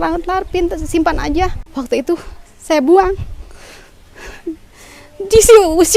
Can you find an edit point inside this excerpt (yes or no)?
yes